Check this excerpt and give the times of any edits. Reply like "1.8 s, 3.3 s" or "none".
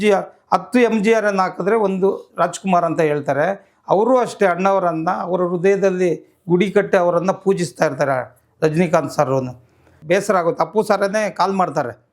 9.9 s